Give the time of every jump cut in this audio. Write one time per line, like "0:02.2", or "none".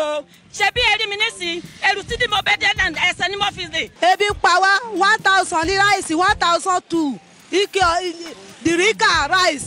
0:04.0